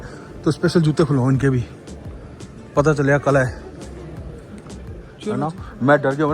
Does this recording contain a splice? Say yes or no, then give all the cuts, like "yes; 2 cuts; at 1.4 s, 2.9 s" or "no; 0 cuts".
yes; 1 cut; at 5.1 s